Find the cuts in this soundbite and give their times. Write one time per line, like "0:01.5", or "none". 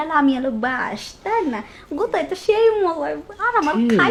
none